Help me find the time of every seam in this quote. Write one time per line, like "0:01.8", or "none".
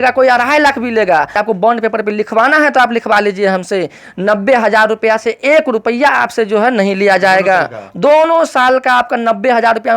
0:01.4

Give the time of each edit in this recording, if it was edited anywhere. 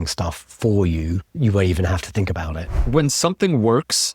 0:01.4
0:02.6

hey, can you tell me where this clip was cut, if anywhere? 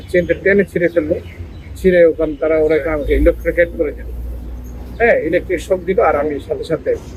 none

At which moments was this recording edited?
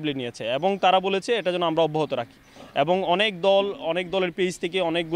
none

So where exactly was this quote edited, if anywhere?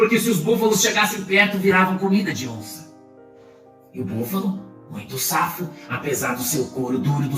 0:02.7
0:03.9

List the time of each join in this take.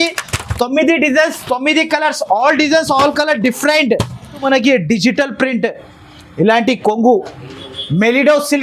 0:04.4

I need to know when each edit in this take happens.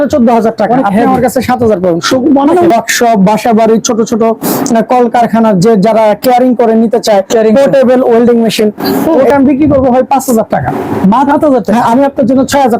0:02.7
0:09.3
0:11.3

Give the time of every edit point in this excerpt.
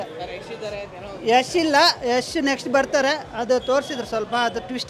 none

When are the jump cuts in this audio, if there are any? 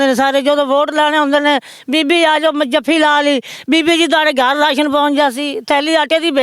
none

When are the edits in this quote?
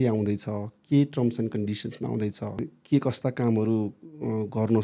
0:02.7

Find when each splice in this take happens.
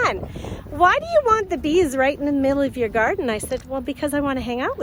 none

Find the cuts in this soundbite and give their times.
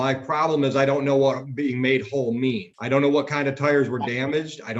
0:02.7

